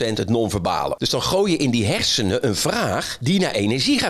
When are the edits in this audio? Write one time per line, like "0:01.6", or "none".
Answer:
0:01.0
0:03.1